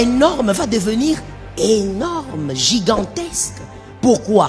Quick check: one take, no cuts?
yes; 0 cuts

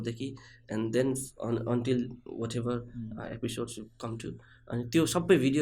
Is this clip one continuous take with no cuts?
yes; 0 cuts

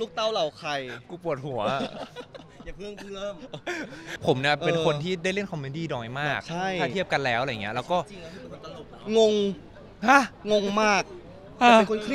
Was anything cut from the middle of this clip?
yes; 1 cut; at 4.1 s

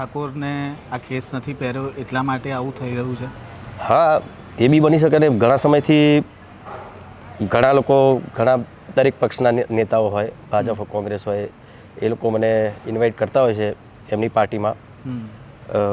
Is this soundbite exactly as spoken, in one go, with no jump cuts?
yes; 0 cuts

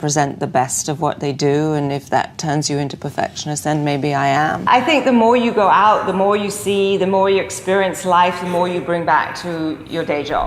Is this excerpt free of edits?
no; 1 cut; at 4.6 s

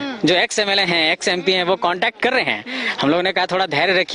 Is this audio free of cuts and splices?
yes; 0 cuts

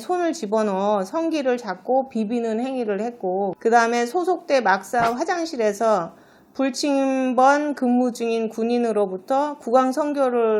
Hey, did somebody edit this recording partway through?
yes; 1 cut; at 3.6 s

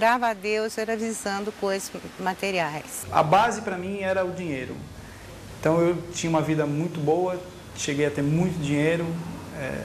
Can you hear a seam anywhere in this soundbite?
no; 0 cuts

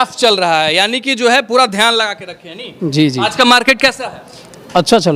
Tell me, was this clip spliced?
no; 0 cuts

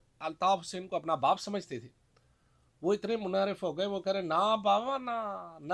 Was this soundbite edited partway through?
no; 0 cuts

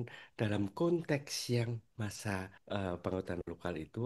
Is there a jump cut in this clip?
yes; 1 cut; at 2.2 s

